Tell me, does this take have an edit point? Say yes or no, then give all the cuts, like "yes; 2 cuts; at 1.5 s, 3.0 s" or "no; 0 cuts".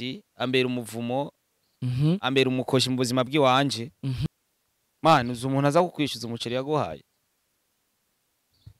yes; 1 cut; at 4.3 s